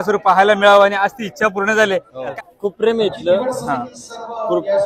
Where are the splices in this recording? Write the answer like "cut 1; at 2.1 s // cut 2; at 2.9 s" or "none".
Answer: cut 1; at 2.3 s

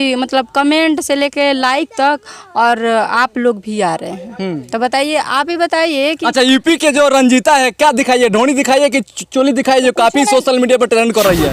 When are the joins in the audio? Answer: none

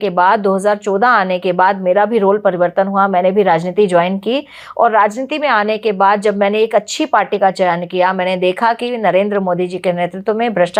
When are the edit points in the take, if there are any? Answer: none

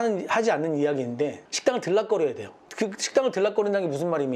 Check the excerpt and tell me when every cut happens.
cut 1; at 2.6 s

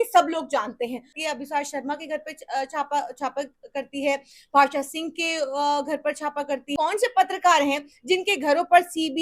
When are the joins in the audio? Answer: cut 1; at 1.2 s // cut 2; at 6.8 s

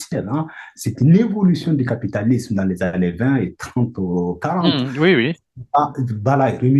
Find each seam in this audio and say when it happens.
none

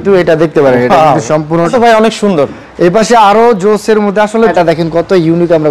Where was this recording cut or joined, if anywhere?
cut 1; at 1.7 s // cut 2; at 4.5 s

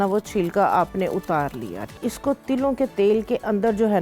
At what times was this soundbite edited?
cut 1; at 2.0 s

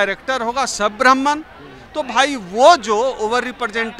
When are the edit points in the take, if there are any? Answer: none

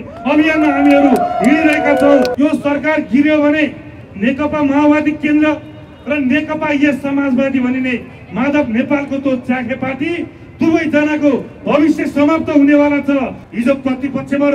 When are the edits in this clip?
cut 1; at 2.3 s // cut 2; at 4.0 s // cut 3; at 13.4 s

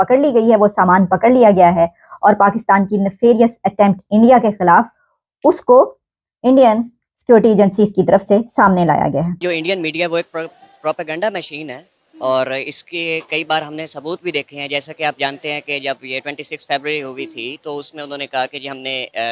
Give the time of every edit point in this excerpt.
cut 1; at 9.4 s

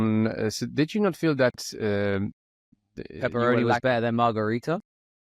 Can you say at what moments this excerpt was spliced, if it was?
none

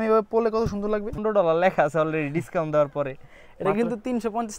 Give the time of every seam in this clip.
cut 1; at 1.1 s

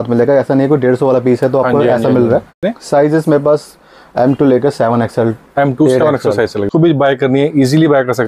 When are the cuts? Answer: cut 1; at 2.7 s // cut 2; at 6.7 s

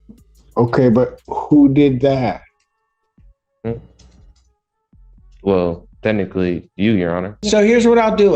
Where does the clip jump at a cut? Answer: cut 1; at 7.4 s

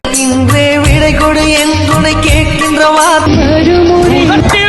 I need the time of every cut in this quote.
cut 1; at 3.2 s

